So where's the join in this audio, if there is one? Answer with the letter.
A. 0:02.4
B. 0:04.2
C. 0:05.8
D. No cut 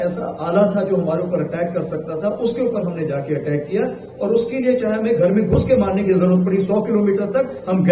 D